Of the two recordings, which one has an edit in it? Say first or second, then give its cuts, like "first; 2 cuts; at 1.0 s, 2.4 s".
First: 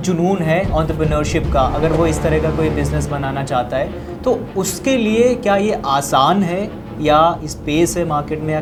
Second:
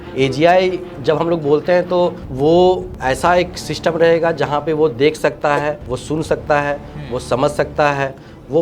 second; 4 cuts; at 0.9 s, 2.2 s, 2.9 s, 5.9 s